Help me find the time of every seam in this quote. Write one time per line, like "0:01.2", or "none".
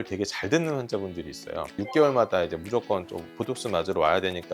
none